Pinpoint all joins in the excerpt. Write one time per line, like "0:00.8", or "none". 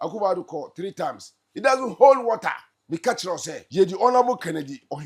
0:02.7
0:03.6